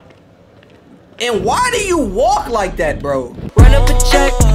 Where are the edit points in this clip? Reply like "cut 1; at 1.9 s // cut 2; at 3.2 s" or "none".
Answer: cut 1; at 3.4 s